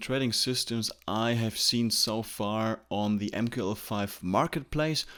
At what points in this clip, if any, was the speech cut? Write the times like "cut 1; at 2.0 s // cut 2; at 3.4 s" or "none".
none